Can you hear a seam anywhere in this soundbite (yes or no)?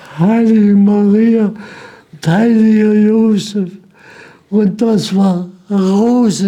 no